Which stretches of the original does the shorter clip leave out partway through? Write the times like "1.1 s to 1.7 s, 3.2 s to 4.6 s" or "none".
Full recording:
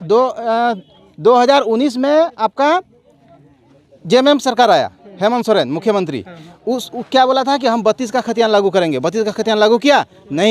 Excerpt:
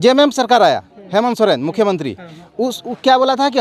none